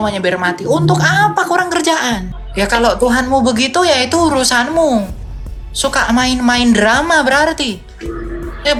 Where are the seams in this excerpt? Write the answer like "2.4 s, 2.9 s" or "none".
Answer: none